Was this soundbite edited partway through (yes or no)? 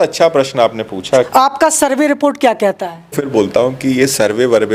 yes